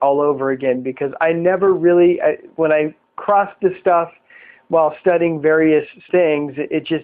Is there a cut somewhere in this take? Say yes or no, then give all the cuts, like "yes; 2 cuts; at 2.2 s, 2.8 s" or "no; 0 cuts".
no; 0 cuts